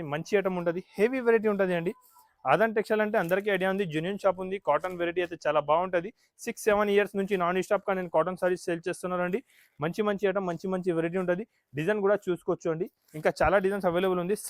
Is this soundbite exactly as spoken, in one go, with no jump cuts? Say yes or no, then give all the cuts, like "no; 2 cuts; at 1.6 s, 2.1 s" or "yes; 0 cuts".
yes; 0 cuts